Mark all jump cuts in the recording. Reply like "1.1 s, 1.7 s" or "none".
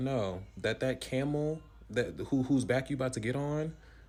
none